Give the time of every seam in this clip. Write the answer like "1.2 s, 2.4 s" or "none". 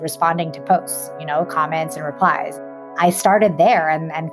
2.6 s